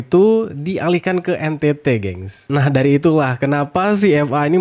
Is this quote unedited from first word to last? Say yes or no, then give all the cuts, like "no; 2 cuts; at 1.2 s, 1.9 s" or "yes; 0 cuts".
yes; 0 cuts